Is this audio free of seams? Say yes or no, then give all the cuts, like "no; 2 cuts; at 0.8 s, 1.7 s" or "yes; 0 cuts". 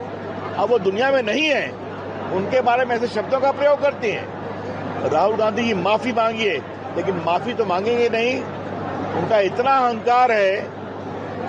yes; 0 cuts